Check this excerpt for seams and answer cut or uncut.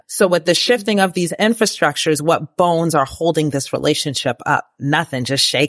uncut